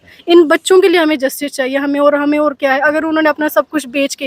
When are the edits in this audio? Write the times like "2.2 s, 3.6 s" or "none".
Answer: none